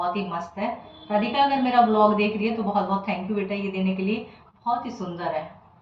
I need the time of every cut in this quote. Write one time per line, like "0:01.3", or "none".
none